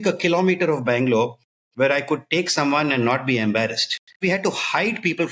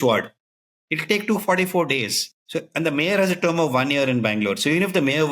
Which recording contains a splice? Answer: first; 1 cut; at 4.2 s

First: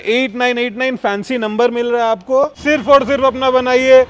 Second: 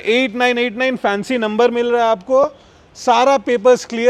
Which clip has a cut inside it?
first; 1 cut; at 2.6 s

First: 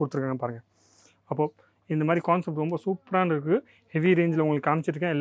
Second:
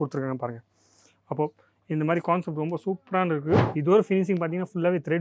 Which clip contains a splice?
second; 1 cut; at 3.7 s

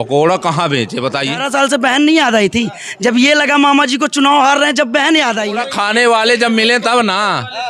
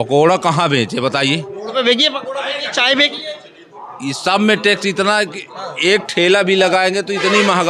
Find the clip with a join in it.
first; 2 cuts; at 1.4 s, 5.5 s

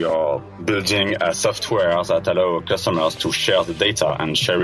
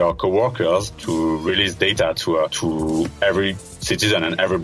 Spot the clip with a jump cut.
second; 3 cuts; at 1.0 s, 2.5 s, 3.7 s

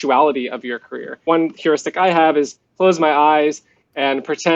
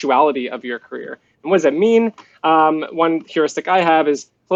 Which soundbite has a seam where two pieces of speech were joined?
first; 1 cut; at 1.2 s

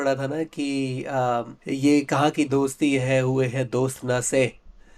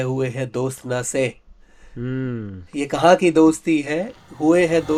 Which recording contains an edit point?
first; 1 cut; at 1.6 s

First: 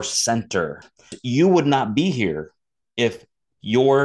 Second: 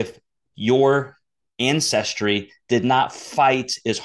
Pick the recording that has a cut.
first; 1 cut; at 1.1 s

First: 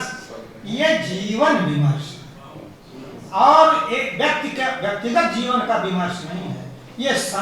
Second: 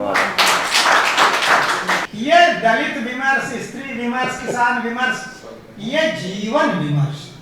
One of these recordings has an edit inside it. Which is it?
second; 1 cut; at 2.0 s

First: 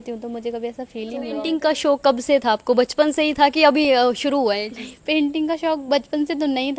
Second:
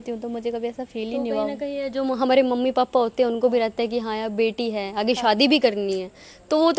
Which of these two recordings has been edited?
first; 1 cut; at 1.4 s

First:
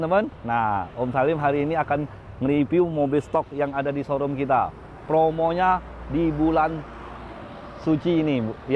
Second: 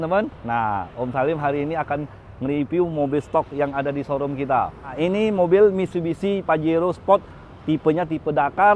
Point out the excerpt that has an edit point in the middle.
second; 1 cut; at 4.9 s

